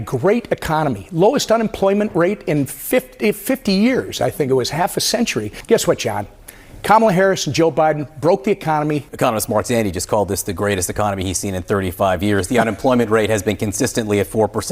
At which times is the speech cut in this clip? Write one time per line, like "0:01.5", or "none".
0:05.5
0:09.0